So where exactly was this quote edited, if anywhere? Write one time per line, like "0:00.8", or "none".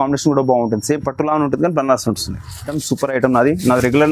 0:02.7